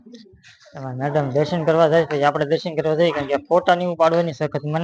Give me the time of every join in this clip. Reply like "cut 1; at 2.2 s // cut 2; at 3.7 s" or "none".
none